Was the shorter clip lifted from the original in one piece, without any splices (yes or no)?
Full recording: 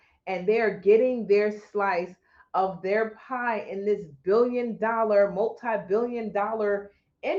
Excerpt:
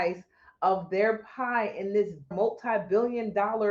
no